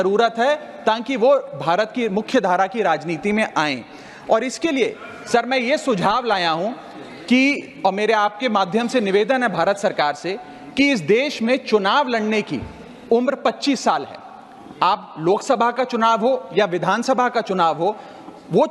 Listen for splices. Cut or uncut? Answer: uncut